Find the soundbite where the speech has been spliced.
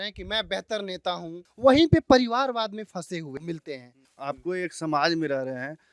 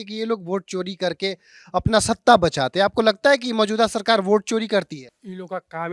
first; 2 cuts; at 1.3 s, 4.1 s

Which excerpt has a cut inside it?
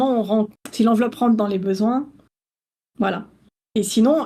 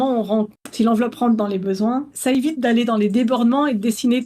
second; 1 cut; at 2.2 s

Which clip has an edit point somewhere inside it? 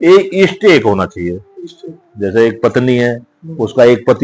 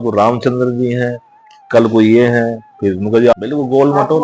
second; 1 cut; at 3.3 s

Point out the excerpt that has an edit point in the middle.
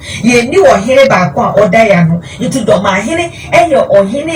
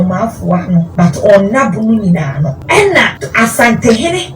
second; 3 cuts; at 0.9 s, 2.6 s, 3.2 s

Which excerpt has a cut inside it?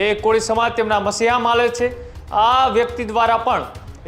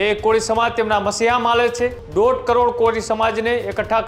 second; 1 cut; at 2.0 s

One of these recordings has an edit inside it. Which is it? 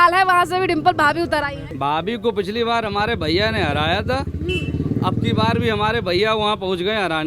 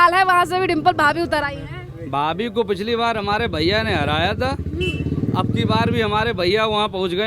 first; 1 cut; at 1.6 s

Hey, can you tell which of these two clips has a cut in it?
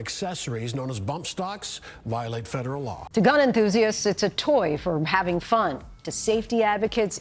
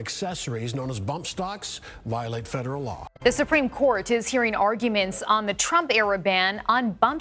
second; 1 cut; at 3.0 s

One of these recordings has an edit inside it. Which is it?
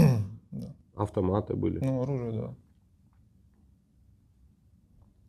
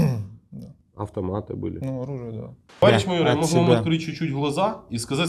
second; 1 cut; at 2.8 s

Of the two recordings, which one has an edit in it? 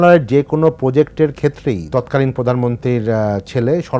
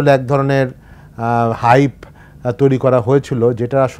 first; 1 cut; at 1.9 s

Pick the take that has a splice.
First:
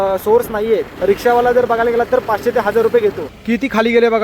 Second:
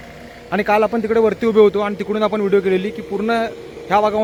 first; 2 cuts; at 0.9 s, 3.3 s

